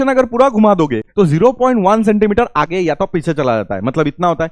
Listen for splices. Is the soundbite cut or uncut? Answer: cut